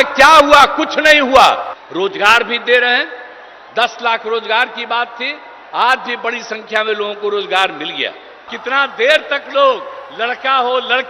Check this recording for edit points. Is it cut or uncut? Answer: cut